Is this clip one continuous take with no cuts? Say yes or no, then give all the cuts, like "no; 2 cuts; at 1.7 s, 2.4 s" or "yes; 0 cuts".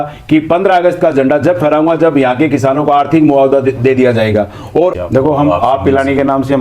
no; 1 cut; at 5.0 s